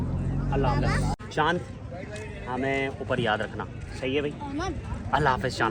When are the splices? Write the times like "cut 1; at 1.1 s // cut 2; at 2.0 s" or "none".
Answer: cut 1; at 1.2 s